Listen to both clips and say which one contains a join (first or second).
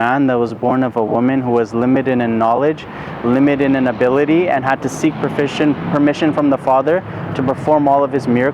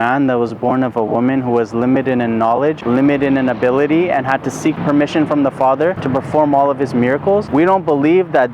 second